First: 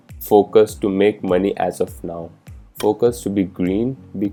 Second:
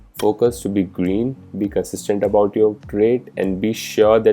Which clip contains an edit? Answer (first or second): second